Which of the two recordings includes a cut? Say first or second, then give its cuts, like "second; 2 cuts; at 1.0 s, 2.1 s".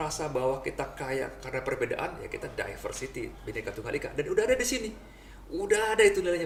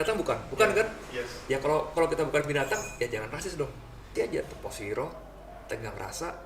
second; 1 cut; at 4.1 s